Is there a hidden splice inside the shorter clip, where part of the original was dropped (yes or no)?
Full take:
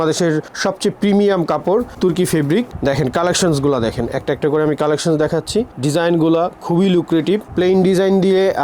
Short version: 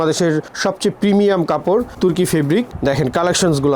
no